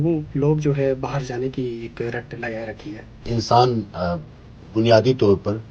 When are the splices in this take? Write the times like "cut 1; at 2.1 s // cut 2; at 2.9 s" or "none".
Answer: cut 1; at 3.3 s